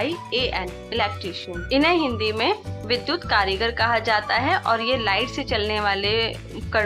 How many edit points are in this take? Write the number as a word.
one